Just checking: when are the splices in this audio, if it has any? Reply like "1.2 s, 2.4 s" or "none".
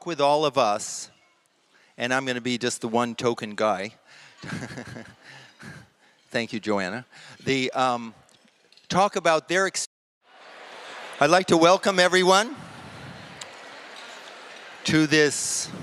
none